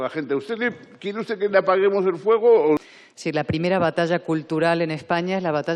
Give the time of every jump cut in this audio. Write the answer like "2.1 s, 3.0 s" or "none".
2.8 s